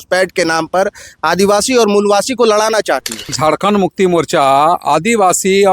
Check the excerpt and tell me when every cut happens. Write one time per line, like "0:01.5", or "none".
0:03.4